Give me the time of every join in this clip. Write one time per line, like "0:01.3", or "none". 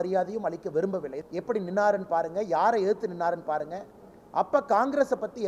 0:01.2

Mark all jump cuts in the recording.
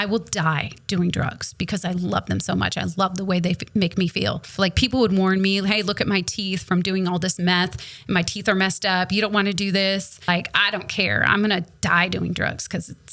0:04.5
0:10.3

